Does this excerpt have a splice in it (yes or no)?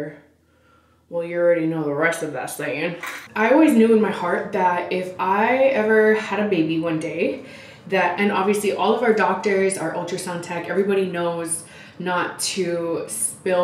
yes